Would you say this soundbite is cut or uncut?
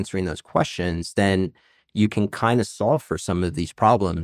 uncut